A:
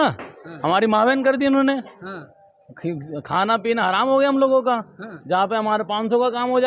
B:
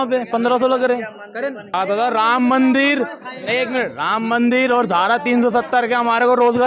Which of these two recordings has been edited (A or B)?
B